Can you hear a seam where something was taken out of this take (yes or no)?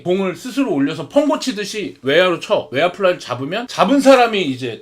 yes